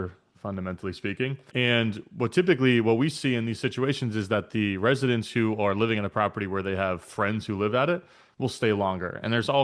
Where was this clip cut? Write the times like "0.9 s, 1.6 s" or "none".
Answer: 1.4 s